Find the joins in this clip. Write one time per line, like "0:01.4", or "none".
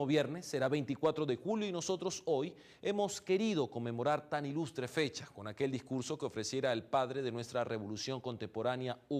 0:05.8